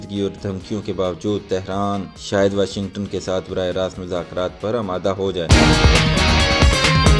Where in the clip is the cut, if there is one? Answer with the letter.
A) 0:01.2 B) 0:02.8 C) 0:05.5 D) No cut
C